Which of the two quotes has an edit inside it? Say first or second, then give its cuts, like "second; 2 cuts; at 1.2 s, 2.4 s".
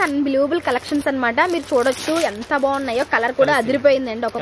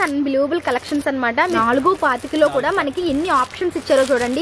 second; 1 cut; at 1.6 s